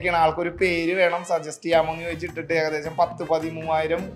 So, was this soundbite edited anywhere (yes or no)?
no